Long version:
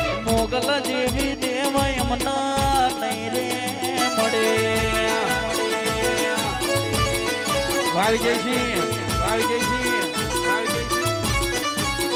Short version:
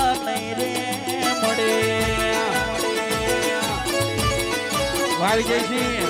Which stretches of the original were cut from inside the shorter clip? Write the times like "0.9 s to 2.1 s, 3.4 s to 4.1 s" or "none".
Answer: none